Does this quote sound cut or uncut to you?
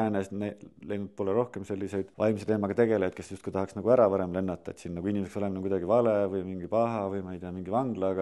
cut